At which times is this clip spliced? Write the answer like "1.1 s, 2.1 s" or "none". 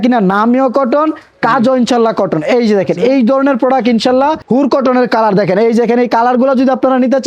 4.4 s